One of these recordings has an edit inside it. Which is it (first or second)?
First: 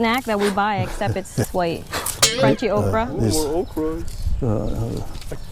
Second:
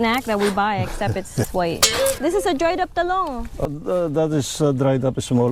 second